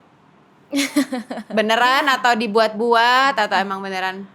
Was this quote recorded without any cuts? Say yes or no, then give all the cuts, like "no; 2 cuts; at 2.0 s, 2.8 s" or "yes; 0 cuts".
yes; 0 cuts